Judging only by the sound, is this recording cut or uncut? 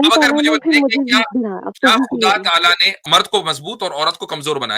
cut